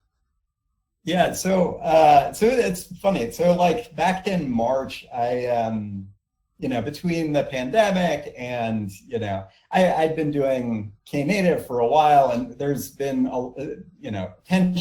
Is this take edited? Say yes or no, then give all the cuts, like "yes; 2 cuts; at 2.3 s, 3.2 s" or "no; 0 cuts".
no; 0 cuts